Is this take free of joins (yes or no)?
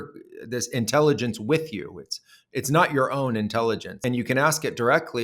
no